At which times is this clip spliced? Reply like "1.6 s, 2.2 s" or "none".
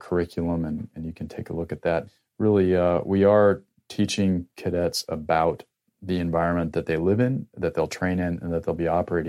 0.9 s, 2.1 s